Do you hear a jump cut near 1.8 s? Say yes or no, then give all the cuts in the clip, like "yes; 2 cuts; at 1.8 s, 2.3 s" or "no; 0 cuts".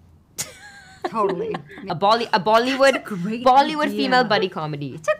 yes; 1 cut; at 1.8 s